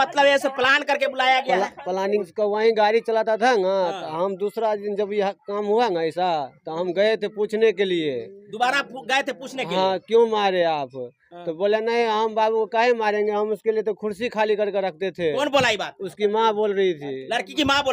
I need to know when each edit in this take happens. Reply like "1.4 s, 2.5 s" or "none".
2.3 s